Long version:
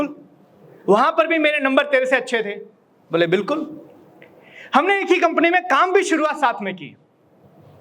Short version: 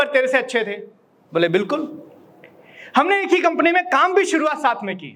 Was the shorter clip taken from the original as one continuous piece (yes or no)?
yes